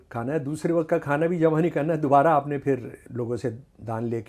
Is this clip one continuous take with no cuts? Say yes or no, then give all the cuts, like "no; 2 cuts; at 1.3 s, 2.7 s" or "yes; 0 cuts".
no; 1 cut; at 3.0 s